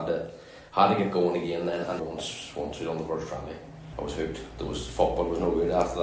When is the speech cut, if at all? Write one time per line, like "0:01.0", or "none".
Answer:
0:02.0
0:03.8